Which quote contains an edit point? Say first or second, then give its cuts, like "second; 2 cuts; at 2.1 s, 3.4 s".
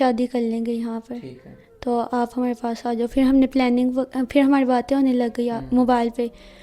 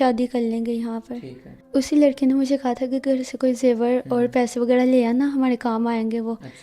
second; 1 cut; at 1.6 s